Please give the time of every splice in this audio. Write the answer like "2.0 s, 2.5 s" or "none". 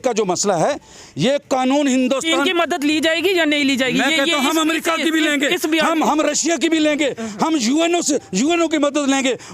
none